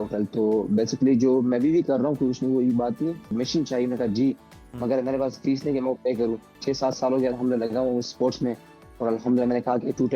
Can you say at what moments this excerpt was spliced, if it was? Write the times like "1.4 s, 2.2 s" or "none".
3.3 s, 6.5 s